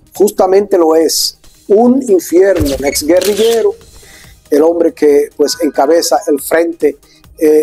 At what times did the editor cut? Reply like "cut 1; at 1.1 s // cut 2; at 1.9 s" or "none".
cut 1; at 2.7 s